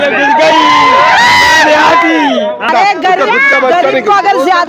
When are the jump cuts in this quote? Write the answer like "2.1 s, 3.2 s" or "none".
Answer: 2.7 s